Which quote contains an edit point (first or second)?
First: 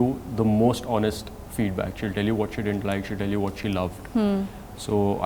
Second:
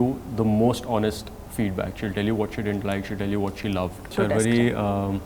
second